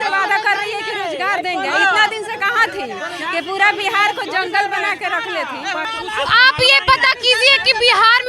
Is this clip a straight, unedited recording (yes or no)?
no